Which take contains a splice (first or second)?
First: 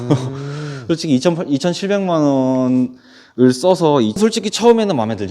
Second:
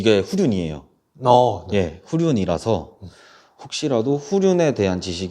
first